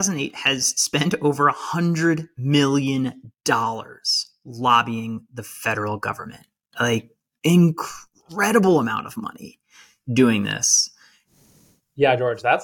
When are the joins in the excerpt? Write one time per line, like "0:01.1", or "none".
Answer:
0:11.3